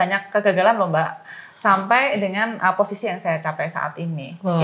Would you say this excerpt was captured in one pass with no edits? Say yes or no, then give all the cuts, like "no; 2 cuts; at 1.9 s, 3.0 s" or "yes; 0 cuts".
yes; 0 cuts